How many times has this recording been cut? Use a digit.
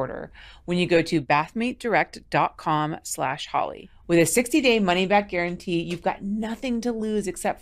0